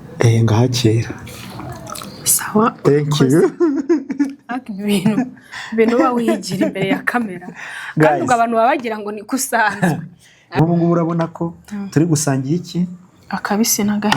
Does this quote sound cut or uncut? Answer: cut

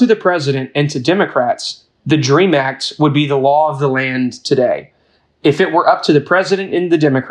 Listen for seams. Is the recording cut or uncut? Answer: uncut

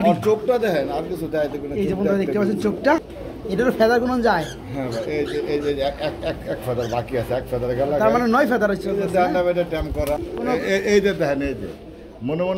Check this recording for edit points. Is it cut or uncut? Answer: cut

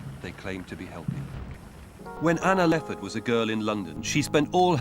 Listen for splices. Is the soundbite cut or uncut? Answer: cut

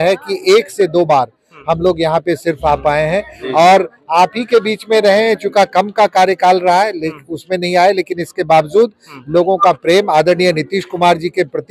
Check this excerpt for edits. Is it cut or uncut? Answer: uncut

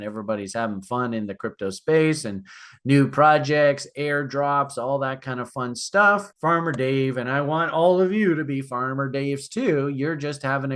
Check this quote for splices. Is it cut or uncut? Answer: uncut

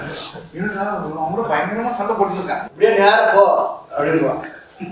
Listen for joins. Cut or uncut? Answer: cut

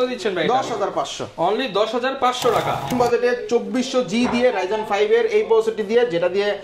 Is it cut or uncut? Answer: cut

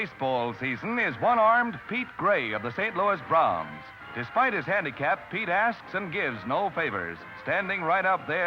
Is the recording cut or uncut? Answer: uncut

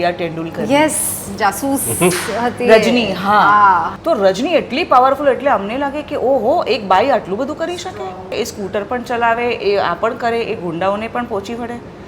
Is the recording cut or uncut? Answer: cut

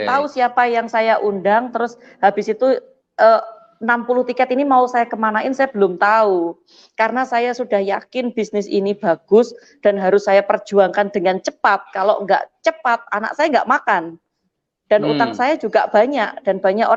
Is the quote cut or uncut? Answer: uncut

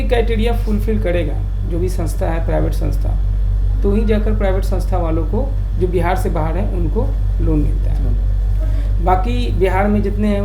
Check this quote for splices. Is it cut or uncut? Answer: uncut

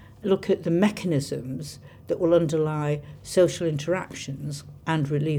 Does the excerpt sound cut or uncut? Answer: uncut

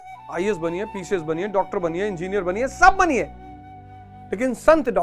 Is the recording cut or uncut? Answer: uncut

